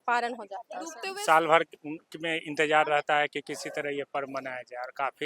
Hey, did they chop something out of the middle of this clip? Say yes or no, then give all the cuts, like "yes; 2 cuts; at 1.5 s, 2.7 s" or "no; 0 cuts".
yes; 1 cut; at 1.0 s